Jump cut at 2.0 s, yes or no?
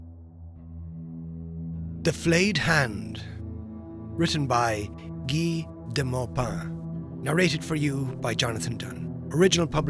yes